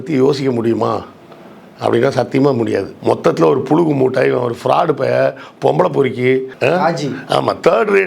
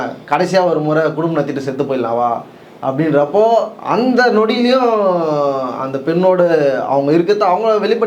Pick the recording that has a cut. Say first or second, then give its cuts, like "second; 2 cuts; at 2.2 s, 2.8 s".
first; 1 cut; at 2.9 s